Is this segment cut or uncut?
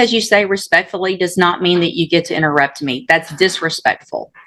uncut